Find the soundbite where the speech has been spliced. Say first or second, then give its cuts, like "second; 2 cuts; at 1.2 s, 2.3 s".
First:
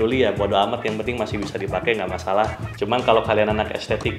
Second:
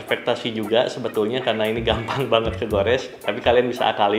first; 1 cut; at 2.6 s